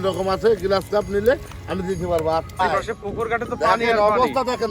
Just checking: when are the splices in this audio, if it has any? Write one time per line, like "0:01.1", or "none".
0:02.5